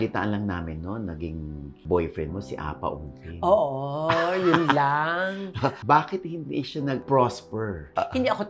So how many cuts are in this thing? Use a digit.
1